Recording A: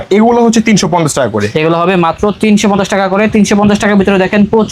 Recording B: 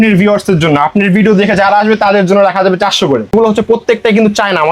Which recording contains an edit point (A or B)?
B